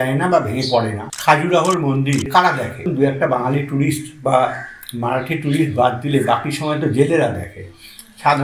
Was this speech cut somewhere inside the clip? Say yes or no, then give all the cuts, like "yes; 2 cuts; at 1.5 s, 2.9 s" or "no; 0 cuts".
yes; 2 cuts; at 1.0 s, 2.5 s